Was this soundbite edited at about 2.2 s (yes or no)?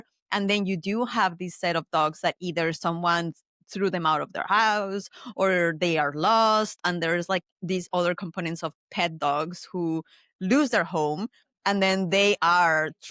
no